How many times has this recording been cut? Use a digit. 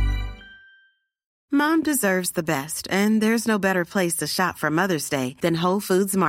1